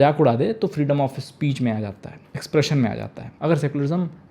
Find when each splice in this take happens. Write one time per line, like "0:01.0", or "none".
0:03.3